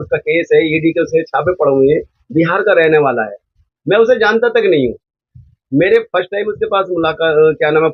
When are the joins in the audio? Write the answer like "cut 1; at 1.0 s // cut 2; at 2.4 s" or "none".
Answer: none